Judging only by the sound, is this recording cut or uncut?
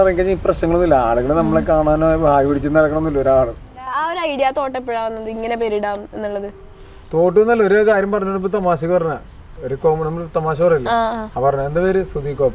cut